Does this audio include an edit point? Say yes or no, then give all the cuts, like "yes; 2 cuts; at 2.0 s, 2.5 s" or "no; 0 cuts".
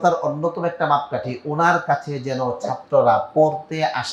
no; 0 cuts